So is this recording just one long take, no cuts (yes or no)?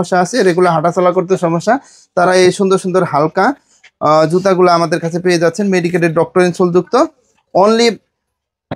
yes